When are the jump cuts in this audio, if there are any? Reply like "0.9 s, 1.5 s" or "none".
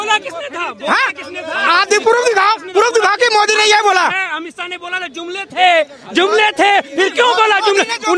none